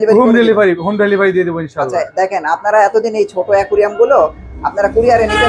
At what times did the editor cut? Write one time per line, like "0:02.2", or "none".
none